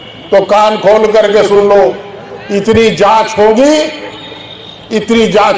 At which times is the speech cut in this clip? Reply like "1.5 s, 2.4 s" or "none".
none